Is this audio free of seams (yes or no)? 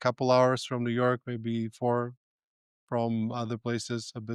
yes